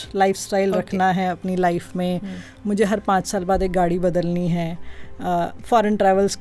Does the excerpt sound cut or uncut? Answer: uncut